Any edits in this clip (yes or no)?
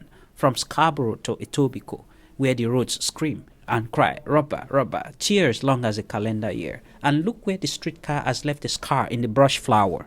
yes